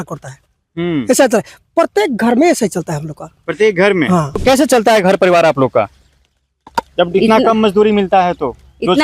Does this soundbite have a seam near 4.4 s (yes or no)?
yes